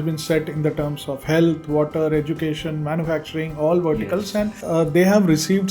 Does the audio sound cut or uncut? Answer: cut